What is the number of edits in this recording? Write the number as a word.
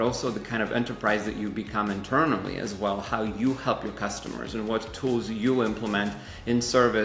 zero